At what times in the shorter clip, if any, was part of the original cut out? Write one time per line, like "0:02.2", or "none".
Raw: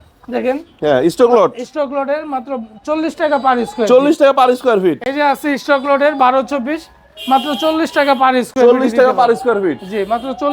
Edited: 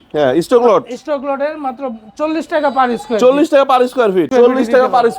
0:04.3